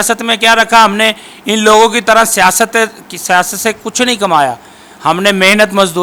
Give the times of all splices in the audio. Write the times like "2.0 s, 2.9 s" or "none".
none